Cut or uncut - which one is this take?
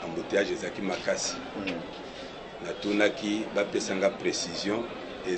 uncut